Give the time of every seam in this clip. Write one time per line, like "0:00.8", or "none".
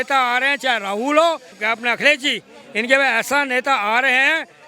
0:01.6